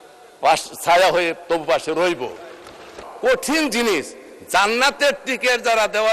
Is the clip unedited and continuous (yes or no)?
no